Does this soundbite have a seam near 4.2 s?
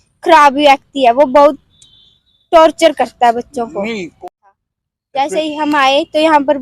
yes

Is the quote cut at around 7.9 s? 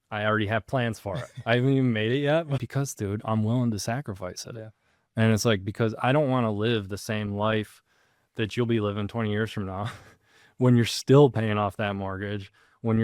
no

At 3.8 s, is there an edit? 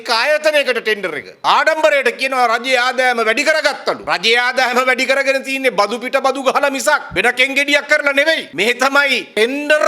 no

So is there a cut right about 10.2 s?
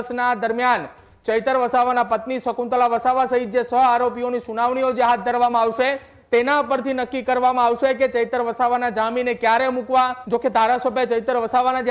yes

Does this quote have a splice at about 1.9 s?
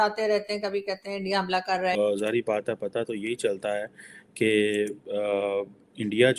yes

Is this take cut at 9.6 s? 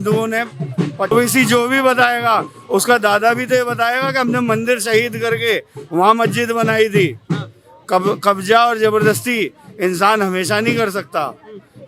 no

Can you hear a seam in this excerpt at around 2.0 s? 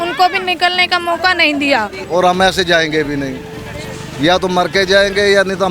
yes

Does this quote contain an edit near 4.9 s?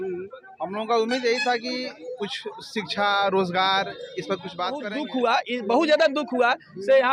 yes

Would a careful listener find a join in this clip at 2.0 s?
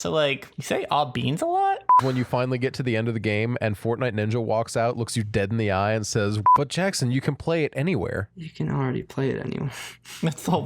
yes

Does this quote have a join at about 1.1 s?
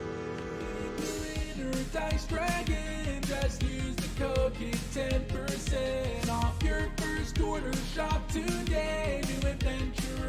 yes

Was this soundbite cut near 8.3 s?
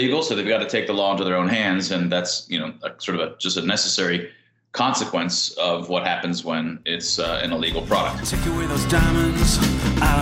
yes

